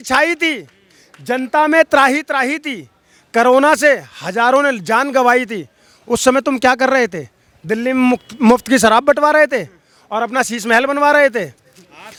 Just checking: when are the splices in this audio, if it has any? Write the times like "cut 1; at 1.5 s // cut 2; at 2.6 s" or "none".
none